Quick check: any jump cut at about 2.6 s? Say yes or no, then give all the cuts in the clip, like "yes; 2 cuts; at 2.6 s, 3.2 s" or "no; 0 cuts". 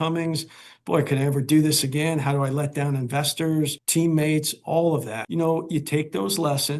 no; 2 cuts; at 3.8 s, 5.2 s